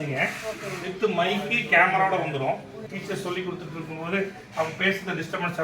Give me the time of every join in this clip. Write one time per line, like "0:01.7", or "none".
0:02.8